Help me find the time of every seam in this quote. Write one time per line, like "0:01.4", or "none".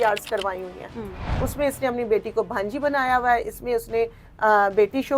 0:01.3